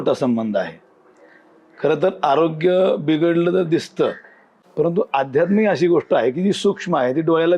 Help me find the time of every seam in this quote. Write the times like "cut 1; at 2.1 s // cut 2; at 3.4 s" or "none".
none